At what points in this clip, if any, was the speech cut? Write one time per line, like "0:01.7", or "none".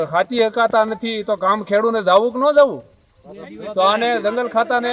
none